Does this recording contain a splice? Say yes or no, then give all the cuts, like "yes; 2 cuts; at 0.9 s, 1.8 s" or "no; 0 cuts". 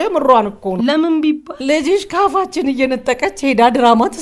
yes; 2 cuts; at 0.8 s, 1.5 s